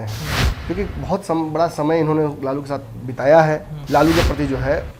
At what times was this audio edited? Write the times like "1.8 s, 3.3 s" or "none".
3.7 s

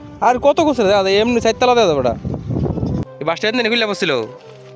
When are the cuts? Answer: 3.0 s

